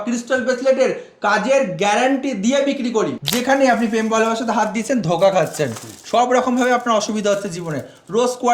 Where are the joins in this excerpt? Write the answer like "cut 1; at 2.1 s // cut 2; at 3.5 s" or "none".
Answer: cut 1; at 3.2 s